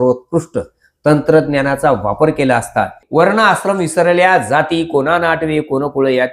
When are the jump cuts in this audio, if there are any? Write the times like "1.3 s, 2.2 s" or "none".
3.0 s